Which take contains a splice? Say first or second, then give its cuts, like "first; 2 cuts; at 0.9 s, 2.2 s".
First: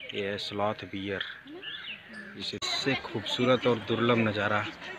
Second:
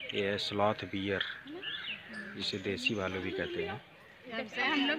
first; 1 cut; at 2.6 s